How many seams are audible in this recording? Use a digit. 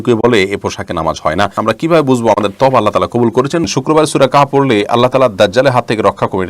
2